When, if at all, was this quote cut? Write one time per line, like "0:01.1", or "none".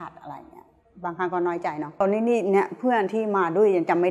0:02.0